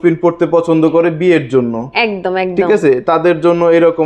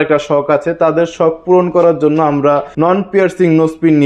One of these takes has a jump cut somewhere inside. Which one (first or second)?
second